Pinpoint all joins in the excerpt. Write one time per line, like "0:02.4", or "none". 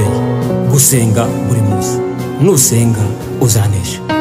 none